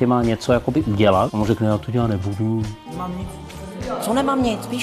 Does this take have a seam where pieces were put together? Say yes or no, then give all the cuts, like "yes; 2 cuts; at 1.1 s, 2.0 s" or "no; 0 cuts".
yes; 2 cuts; at 1.3 s, 2.8 s